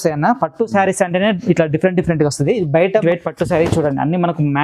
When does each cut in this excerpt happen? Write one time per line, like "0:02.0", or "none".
0:03.0